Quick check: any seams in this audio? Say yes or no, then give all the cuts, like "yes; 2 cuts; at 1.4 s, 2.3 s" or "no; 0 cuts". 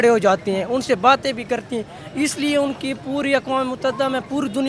no; 0 cuts